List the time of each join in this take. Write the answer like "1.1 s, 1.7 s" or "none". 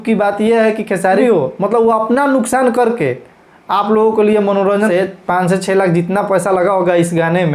1.2 s, 4.9 s

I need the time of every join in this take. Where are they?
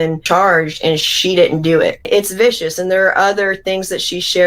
2.1 s

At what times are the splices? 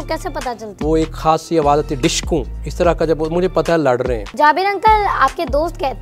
0.8 s, 2.6 s, 4.3 s

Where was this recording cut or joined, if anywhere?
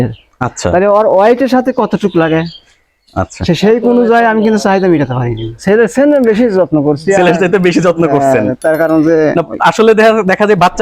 5.6 s

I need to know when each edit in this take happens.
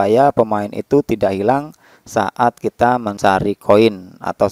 3.1 s

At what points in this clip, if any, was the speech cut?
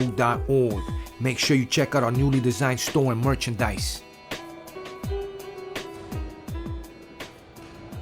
3.7 s

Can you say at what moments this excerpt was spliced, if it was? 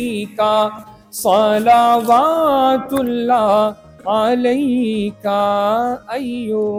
none

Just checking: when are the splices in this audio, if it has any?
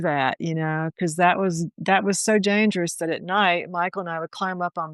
none

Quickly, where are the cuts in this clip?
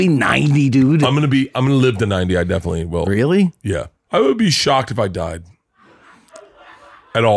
3.0 s, 3.9 s

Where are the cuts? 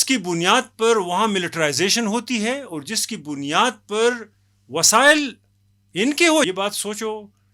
6.5 s

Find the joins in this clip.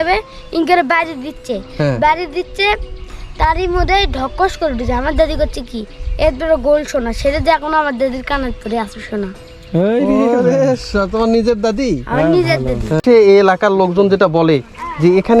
13.0 s

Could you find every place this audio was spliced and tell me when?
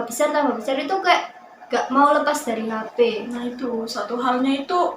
3.3 s

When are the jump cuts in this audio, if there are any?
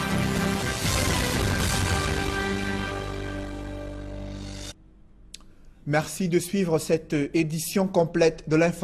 4.4 s

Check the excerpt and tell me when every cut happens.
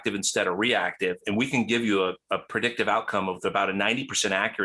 none

